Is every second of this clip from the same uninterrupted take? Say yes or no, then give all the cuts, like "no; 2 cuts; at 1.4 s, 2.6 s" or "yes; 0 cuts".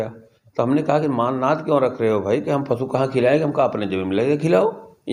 yes; 0 cuts